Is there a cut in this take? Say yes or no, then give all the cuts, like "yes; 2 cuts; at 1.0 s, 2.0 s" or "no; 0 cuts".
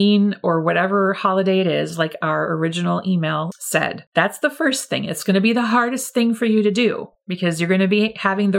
no; 0 cuts